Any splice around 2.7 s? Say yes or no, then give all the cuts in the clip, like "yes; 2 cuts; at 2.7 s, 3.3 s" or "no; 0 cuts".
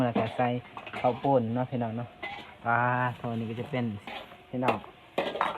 no; 1 cut; at 4.1 s